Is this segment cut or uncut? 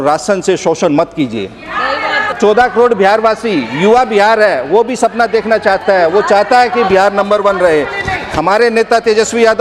uncut